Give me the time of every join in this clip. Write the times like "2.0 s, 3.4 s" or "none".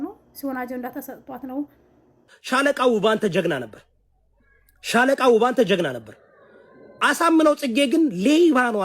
2.3 s